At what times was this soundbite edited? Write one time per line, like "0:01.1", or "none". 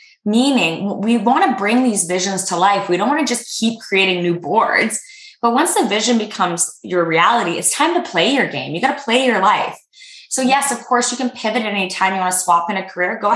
none